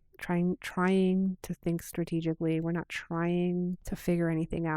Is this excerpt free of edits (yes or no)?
no